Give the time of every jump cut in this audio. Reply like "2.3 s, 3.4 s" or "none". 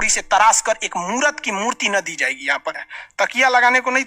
2.8 s

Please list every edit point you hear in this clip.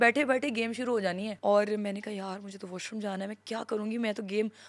1.3 s

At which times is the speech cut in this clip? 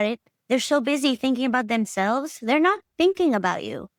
none

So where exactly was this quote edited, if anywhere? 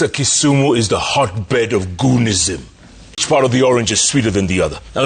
3.2 s

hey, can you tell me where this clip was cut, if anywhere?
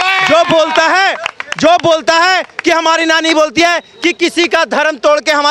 none

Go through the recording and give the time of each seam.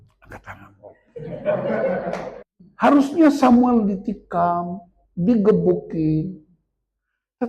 2.3 s

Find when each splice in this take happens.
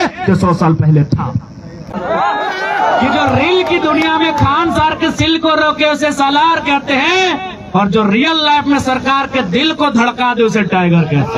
none

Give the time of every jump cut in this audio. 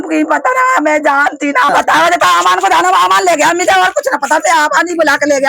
1.7 s

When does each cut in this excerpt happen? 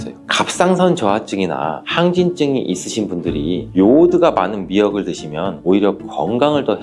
none

